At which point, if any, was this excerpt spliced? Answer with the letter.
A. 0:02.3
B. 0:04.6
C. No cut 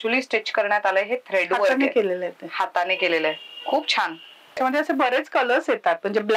B